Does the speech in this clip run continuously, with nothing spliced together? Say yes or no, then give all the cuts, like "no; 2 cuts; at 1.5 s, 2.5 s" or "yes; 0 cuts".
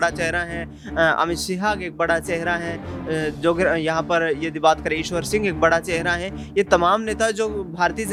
yes; 0 cuts